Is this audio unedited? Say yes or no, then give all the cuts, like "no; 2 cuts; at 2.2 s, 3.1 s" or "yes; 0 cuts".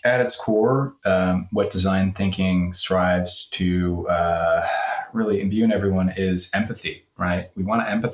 yes; 0 cuts